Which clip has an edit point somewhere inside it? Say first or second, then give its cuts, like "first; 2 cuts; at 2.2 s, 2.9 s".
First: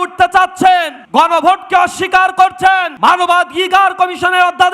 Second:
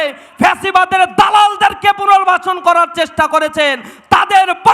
first; 2 cuts; at 1.0 s, 2.9 s